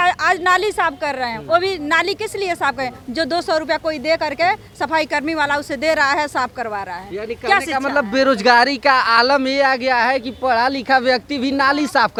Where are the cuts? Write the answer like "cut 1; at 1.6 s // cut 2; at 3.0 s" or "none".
none